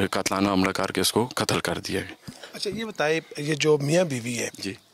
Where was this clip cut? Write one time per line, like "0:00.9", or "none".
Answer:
none